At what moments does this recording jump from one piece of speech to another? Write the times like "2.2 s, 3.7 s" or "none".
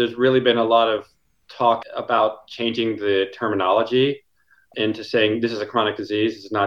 1.8 s, 4.7 s